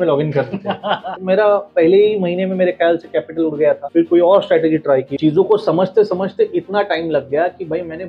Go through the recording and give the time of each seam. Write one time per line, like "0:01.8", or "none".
0:01.1
0:03.8
0:05.1